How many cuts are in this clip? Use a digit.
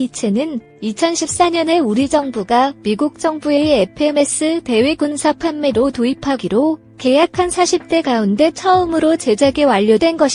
0